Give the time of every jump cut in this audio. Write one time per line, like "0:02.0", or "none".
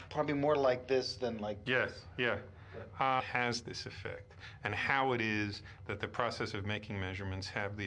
none